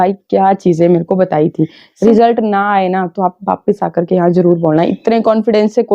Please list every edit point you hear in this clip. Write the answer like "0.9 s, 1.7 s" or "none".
1.9 s

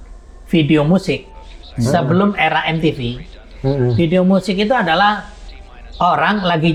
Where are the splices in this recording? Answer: none

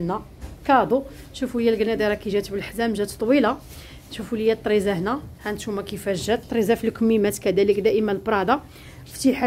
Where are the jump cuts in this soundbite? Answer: none

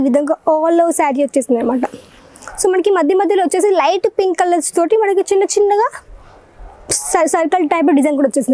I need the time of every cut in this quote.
none

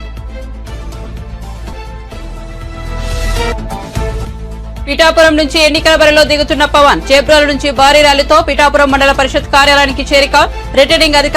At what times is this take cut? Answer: 1.0 s

